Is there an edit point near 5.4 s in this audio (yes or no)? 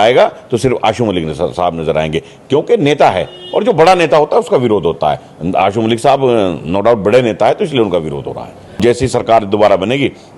no